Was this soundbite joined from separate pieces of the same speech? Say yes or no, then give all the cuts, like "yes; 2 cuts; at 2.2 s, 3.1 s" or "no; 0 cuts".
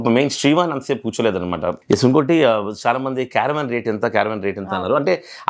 yes; 1 cut; at 1.8 s